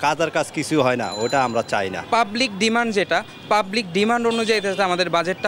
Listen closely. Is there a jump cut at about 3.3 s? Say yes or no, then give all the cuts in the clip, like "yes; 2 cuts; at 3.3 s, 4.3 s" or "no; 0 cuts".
no; 1 cut; at 2.0 s